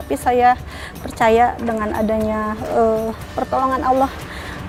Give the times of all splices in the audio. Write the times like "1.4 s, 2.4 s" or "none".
none